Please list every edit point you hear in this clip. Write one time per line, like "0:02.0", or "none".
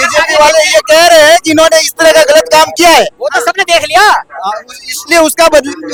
none